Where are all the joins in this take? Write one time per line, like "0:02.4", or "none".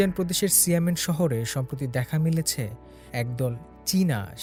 none